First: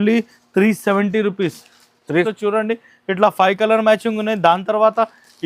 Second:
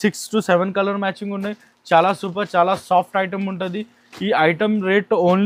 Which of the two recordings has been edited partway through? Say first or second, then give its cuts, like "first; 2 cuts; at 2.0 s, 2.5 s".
first; 1 cut; at 2.3 s